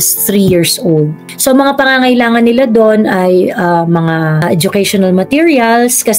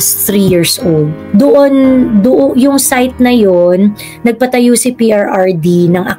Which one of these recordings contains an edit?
second; 1 cut; at 1.2 s

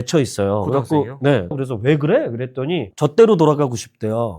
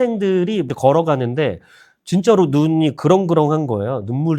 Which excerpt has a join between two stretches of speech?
first; 2 cuts; at 1.5 s, 2.9 s

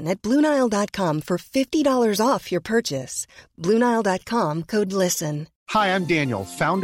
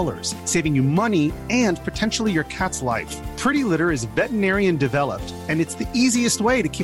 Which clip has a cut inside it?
first; 1 cut; at 5.5 s

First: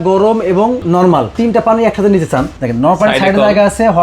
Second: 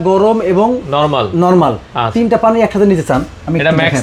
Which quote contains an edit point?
first; 2 cuts; at 0.9 s, 2.6 s

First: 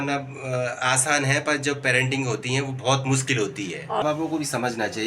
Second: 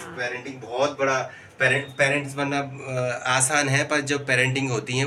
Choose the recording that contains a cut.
first; 1 cut; at 4.0 s

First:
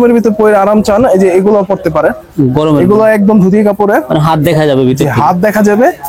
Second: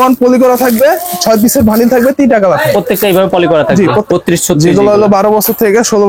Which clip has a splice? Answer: second; 1 cut; at 4.1 s

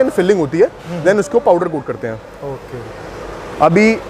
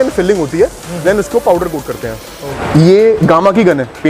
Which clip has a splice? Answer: second; 1 cut; at 2.6 s

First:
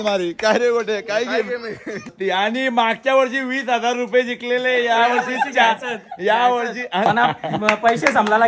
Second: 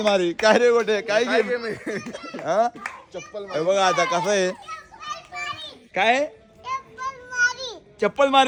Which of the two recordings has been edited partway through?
first; 2 cuts; at 2.1 s, 7.1 s

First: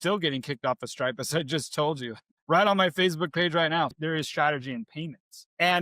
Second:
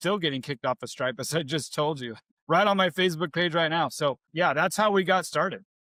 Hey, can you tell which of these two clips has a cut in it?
first; 1 cut; at 3.9 s

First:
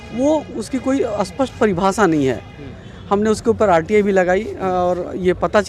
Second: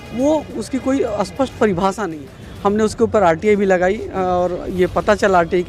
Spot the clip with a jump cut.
second; 1 cut; at 2.1 s

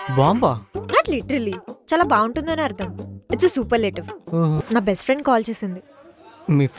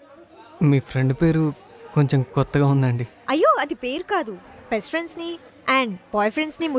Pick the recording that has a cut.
first; 1 cut; at 4.6 s

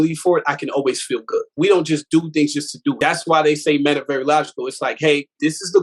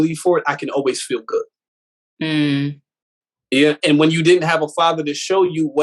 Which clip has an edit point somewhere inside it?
first; 2 cuts; at 1.5 s, 3.0 s

